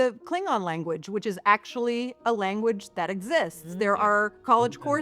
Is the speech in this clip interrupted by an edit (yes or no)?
no